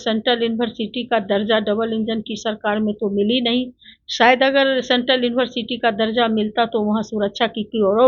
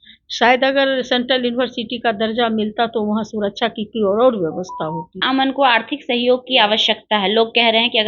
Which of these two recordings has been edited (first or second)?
second